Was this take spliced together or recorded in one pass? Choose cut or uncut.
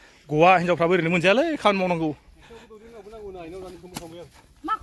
uncut